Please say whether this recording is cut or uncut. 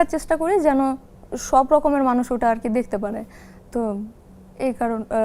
uncut